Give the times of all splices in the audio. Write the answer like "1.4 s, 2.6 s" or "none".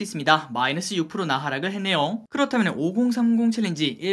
2.2 s

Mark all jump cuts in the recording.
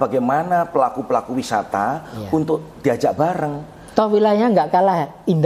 none

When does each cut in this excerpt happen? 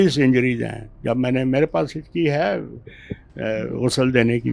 none

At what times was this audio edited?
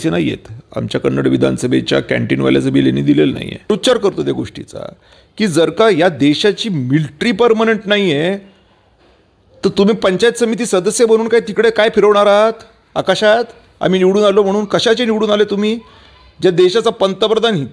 3.7 s

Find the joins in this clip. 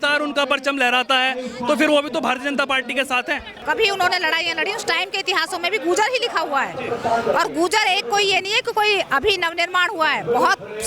3.6 s

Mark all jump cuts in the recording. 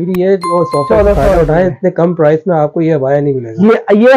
none

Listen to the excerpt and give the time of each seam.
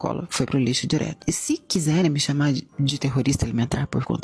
1.2 s

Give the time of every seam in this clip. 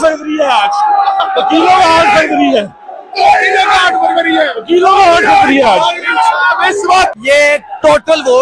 7.1 s

